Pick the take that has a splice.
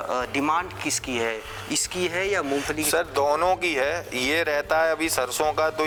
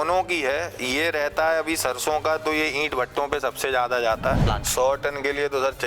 second; 1 cut; at 4.5 s

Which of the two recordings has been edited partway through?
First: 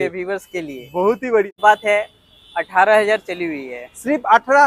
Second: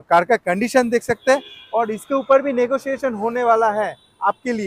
first; 1 cut; at 1.5 s

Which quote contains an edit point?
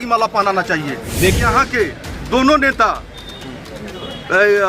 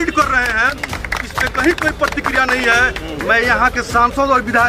first; 1 cut; at 1.3 s

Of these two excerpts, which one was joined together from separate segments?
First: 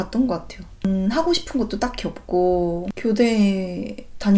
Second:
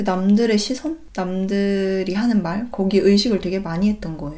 first; 1 cut; at 2.9 s

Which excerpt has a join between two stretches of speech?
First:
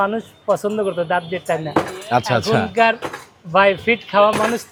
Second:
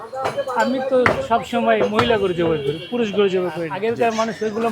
second; 1 cut; at 3.7 s

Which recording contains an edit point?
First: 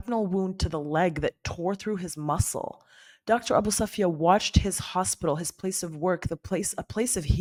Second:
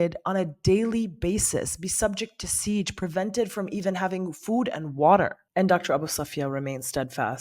second; 1 cut; at 5.4 s

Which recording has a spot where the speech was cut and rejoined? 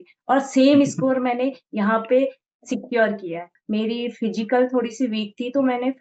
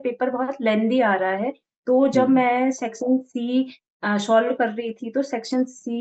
first; 1 cut; at 3.5 s

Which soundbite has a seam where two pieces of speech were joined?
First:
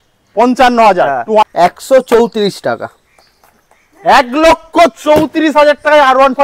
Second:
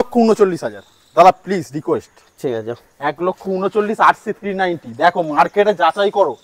first; 1 cut; at 1.4 s

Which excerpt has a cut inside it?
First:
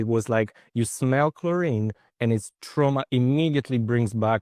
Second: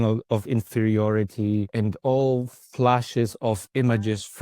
second; 1 cut; at 1.7 s

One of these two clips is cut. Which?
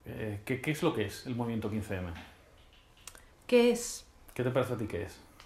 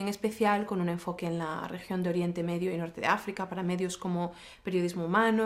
second; 1 cut; at 1.7 s

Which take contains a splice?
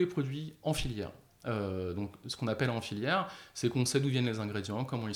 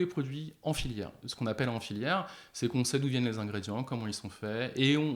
second; 1 cut; at 1.2 s

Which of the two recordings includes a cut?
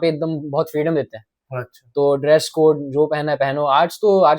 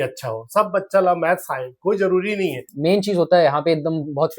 second; 1 cut; at 2.7 s

